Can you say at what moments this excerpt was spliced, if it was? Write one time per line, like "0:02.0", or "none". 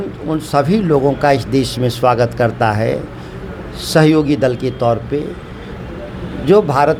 none